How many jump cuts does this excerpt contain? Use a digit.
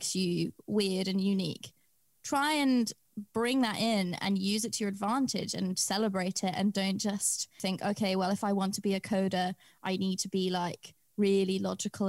0